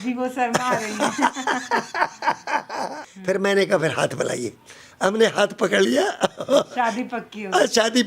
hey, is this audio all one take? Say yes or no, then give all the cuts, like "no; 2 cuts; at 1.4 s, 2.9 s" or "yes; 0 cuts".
no; 1 cut; at 3.1 s